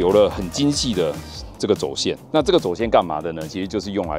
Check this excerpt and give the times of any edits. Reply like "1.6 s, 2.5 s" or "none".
none